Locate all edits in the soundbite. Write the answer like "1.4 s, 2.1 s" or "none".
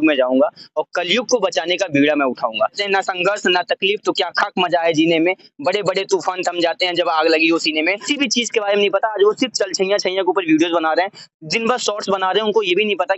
2.8 s, 8.0 s